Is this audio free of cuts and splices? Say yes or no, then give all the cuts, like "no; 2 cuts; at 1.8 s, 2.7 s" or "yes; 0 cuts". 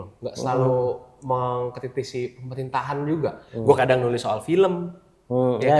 yes; 0 cuts